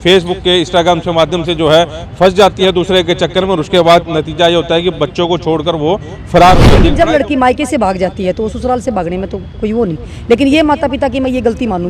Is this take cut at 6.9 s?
yes; 1 cut; at 6.9 s

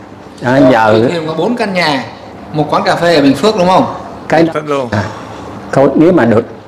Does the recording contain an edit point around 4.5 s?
yes; 1 cut; at 4.5 s

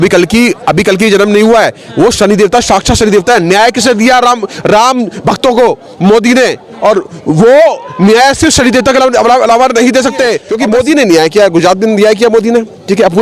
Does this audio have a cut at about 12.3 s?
no; 1 cut; at 10.5 s

